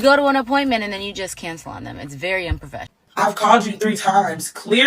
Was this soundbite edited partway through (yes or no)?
yes